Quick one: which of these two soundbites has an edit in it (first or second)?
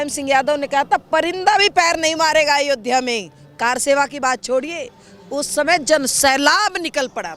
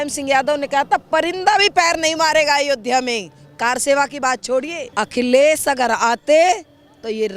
second